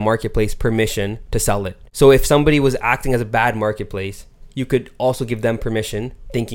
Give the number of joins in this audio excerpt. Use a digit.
1